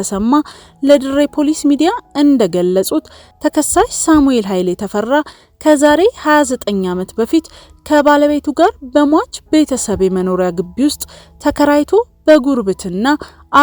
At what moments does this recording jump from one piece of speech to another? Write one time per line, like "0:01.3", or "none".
none